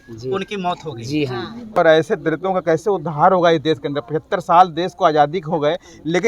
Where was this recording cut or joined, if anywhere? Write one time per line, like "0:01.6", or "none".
0:01.8